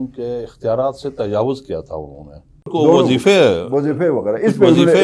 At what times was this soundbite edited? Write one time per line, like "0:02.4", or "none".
0:02.7